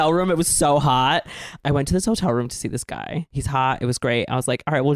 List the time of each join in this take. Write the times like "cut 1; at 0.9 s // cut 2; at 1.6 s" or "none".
cut 1; at 1.7 s // cut 2; at 3.4 s